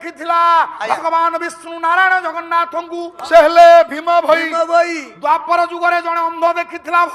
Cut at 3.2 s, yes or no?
yes